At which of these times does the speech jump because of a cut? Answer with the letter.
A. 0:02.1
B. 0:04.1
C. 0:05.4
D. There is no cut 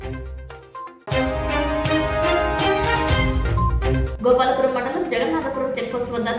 B